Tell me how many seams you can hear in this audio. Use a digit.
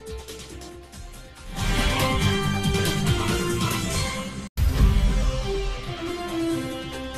0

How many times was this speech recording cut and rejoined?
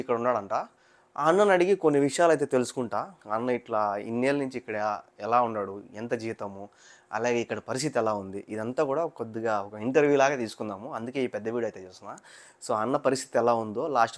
0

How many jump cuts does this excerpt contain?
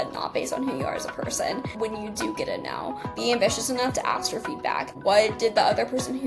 3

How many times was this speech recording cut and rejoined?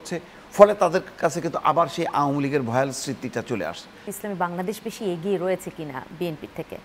1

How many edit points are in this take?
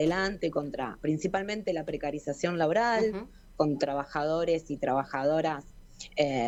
0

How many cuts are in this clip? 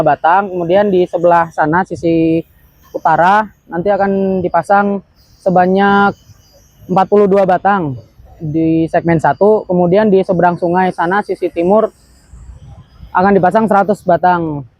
0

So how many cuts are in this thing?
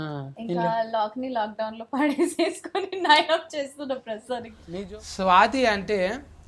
1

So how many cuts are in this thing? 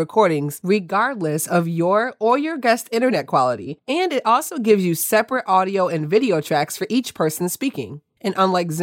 0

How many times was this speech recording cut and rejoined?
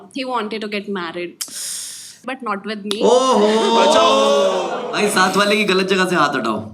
2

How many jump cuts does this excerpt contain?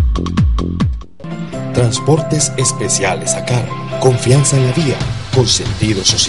1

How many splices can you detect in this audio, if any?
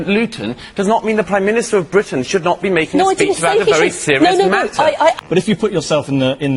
1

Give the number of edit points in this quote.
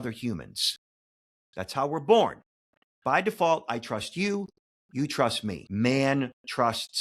1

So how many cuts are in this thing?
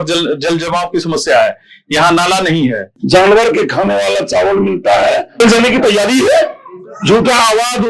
2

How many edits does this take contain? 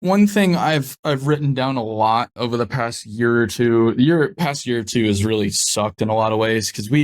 1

